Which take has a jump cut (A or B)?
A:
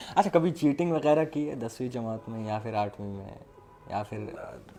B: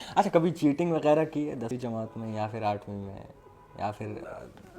B